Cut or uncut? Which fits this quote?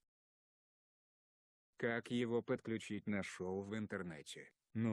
cut